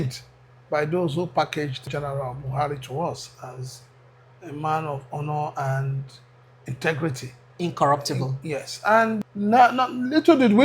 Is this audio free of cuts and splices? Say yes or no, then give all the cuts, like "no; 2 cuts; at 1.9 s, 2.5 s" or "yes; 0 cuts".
no; 2 cuts; at 1.8 s, 9.3 s